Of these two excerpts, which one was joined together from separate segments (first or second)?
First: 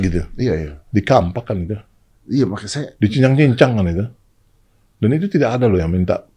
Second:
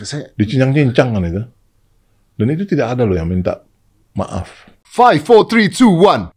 second